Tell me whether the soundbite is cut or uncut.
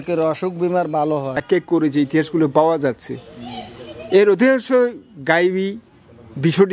cut